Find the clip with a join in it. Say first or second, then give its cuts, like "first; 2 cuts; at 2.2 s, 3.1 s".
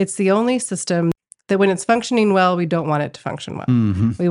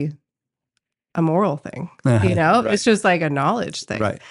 first; 1 cut; at 1.2 s